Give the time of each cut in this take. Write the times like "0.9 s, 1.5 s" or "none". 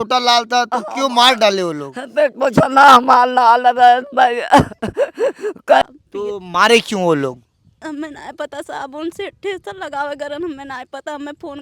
5.8 s